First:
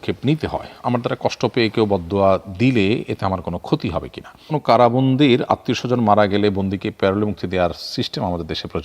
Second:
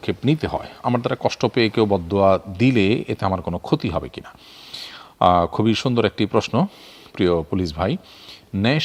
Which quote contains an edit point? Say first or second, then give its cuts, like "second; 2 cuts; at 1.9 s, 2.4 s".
first; 1 cut; at 4.5 s